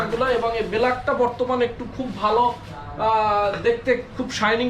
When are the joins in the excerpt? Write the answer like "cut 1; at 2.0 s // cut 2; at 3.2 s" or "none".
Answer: none

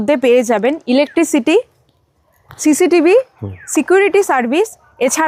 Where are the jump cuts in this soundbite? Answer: none

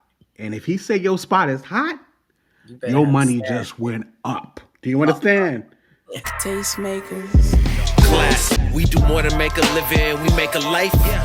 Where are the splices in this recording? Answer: cut 1; at 6.3 s

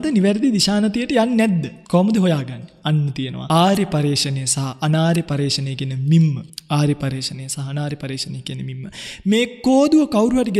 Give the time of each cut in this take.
cut 1; at 1.7 s // cut 2; at 3.3 s // cut 3; at 6.5 s

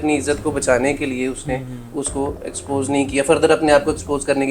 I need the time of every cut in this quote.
none

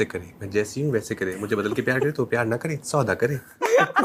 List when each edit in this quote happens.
none

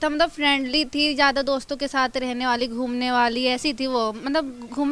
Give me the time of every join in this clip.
none

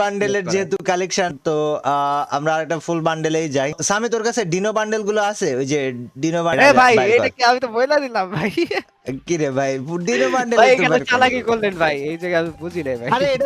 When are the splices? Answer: cut 1; at 1.4 s // cut 2; at 3.8 s // cut 3; at 6.5 s

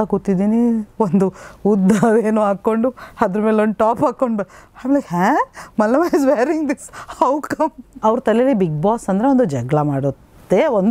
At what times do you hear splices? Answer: cut 1; at 8.0 s

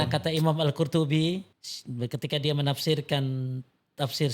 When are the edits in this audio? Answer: none

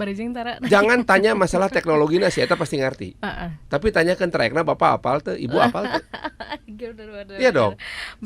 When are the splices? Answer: none

